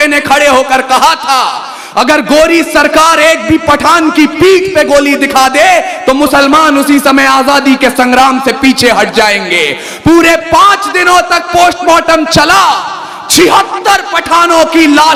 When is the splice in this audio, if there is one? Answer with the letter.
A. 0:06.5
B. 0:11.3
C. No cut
C